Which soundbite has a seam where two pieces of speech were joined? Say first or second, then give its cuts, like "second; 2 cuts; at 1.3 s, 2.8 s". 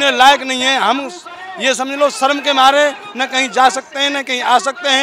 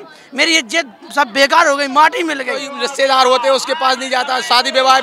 second; 1 cut; at 2.8 s